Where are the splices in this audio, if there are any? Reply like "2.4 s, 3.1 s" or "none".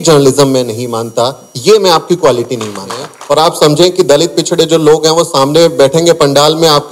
3.1 s